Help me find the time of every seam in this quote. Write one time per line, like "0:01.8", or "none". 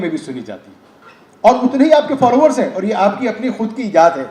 none